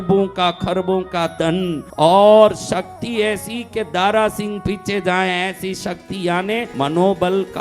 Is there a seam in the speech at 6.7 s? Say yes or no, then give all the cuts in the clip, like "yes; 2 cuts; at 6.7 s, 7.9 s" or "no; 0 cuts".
yes; 2 cuts; at 1.8 s, 6.7 s